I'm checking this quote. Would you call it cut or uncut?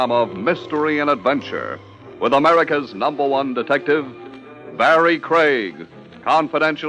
cut